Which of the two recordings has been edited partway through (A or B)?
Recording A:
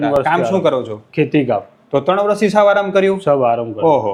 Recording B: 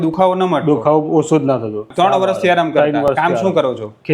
B